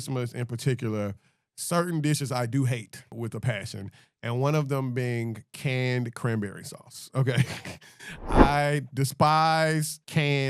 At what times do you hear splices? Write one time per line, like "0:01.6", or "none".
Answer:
0:03.1